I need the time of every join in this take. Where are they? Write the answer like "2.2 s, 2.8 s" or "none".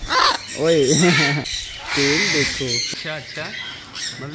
1.4 s, 2.9 s